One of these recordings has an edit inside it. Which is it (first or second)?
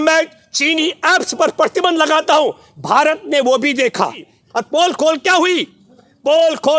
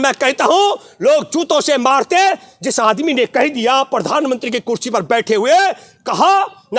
first